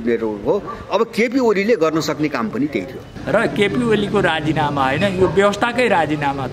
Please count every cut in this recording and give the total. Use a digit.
1